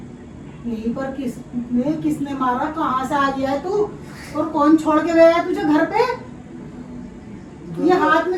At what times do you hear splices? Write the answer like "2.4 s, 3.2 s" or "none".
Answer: none